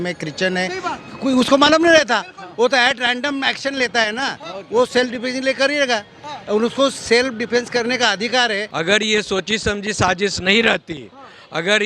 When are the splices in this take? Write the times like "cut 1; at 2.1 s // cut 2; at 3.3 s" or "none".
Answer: cut 1; at 8.7 s